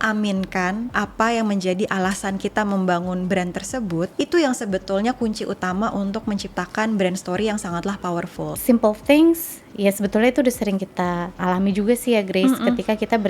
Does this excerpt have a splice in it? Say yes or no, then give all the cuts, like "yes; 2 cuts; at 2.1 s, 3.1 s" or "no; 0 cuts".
yes; 4 cuts; at 0.9 s, 4.1 s, 8.6 s, 11.3 s